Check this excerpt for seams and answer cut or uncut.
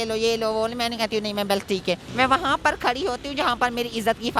cut